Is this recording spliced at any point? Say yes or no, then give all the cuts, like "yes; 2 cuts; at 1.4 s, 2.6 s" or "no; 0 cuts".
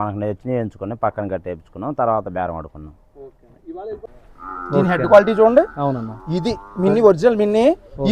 yes; 1 cut; at 4.1 s